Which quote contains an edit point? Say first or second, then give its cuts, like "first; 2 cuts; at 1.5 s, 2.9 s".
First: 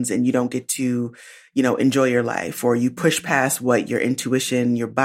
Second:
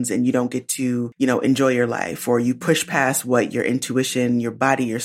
second; 1 cut; at 1.1 s